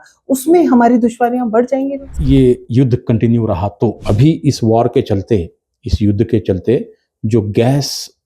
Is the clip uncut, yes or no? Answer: no